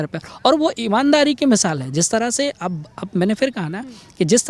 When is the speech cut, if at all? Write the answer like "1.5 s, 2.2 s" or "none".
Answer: none